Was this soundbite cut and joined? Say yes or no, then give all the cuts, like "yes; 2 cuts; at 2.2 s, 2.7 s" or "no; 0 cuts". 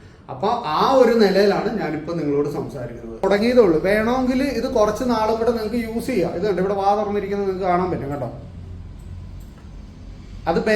yes; 1 cut; at 3.2 s